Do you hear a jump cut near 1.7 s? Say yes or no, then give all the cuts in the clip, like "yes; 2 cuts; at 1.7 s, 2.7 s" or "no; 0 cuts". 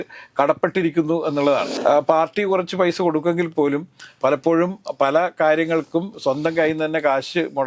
yes; 1 cut; at 1.7 s